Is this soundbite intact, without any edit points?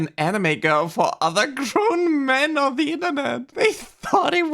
no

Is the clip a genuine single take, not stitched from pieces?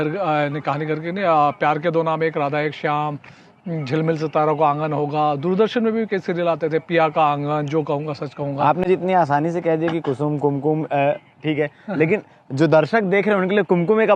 yes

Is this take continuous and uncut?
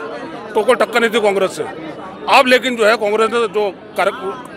yes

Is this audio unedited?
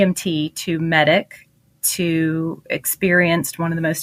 yes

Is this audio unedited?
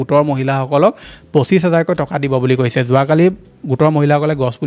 yes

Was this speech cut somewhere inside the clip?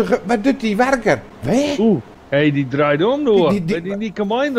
yes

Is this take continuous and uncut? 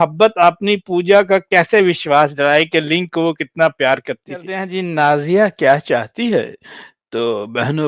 no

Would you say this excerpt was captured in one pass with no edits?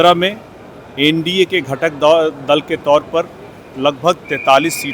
yes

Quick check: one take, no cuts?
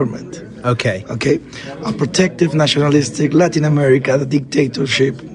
yes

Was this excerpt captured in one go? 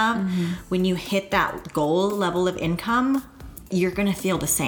no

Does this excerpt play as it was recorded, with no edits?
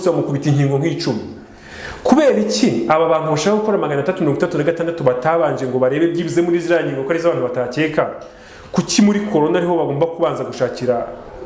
yes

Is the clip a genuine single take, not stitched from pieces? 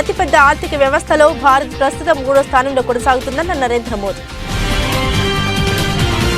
yes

